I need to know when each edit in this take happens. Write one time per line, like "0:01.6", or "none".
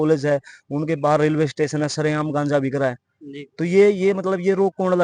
none